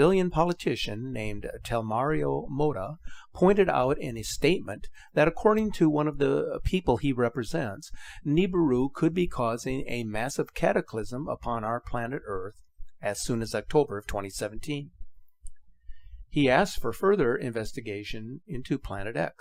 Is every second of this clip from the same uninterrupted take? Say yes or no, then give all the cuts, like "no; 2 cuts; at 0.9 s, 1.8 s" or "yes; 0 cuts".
yes; 0 cuts